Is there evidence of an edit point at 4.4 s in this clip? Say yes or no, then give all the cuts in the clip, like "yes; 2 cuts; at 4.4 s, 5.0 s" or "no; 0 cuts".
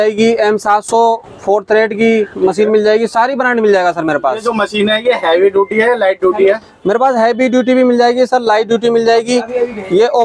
no; 0 cuts